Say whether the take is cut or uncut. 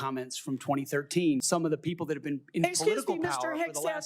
cut